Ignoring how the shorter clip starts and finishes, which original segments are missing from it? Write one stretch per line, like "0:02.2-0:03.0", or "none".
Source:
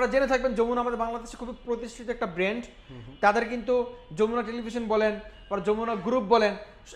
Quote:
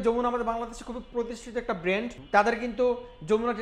0:02.7-0:03.1